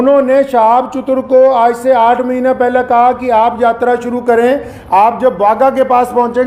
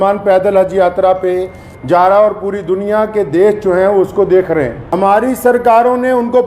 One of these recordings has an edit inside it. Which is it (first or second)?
second